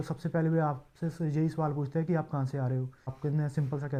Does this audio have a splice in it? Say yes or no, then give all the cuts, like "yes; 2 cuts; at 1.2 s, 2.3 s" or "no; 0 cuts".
no; 0 cuts